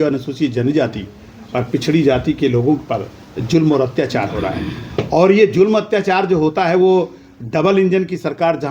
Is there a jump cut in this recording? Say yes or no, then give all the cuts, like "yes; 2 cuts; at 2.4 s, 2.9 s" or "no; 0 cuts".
no; 0 cuts